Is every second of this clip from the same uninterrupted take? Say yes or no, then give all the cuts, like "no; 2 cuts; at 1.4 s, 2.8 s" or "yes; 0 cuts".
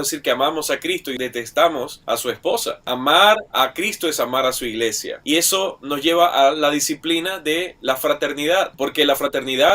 no; 2 cuts; at 1.1 s, 2.8 s